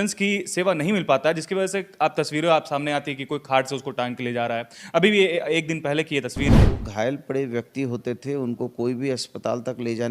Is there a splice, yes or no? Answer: yes